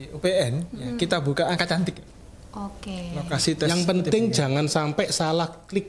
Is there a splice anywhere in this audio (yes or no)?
yes